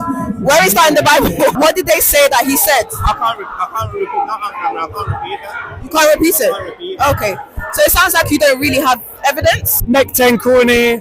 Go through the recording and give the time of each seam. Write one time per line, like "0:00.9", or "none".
0:01.5
0:09.8